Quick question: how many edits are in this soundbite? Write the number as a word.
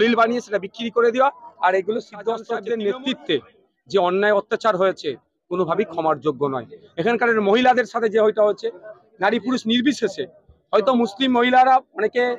one